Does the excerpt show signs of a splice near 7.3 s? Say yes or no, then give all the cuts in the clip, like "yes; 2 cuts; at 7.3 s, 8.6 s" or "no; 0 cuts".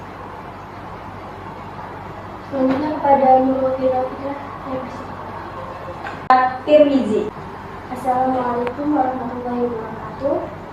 yes; 2 cuts; at 6.3 s, 7.3 s